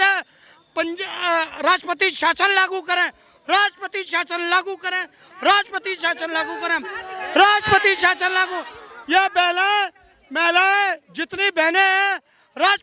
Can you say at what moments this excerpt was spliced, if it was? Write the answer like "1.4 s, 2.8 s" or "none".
none